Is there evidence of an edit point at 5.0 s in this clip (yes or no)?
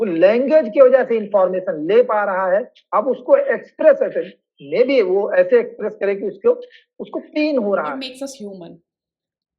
no